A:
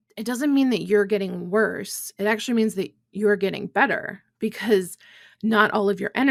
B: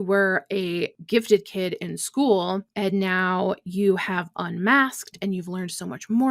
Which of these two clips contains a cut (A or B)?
B